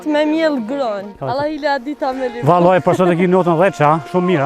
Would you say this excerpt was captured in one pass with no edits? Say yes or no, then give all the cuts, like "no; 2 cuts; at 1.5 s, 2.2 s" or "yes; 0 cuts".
no; 1 cut; at 1.1 s